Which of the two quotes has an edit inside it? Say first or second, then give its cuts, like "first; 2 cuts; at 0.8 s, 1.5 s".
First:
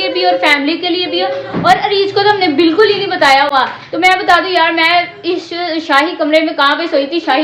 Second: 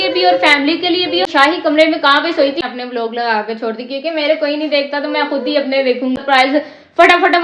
second; 3 cuts; at 1.3 s, 2.6 s, 6.2 s